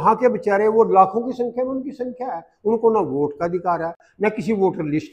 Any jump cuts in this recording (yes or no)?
no